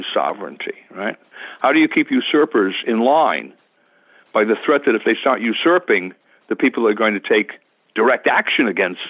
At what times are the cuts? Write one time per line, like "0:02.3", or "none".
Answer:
none